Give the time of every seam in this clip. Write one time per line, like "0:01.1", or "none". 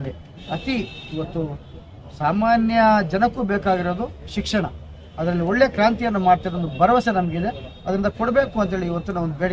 none